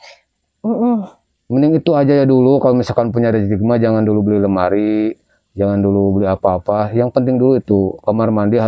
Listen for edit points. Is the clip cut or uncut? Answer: uncut